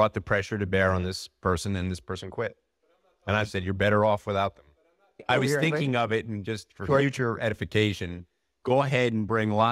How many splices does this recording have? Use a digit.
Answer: 1